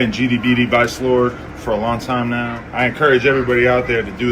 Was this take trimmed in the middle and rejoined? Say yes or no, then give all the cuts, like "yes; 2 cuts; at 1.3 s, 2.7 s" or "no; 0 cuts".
yes; 1 cut; at 2.6 s